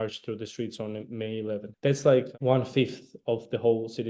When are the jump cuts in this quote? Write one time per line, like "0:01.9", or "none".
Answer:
0:01.7
0:02.3